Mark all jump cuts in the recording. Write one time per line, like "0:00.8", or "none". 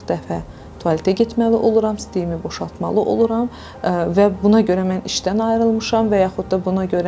none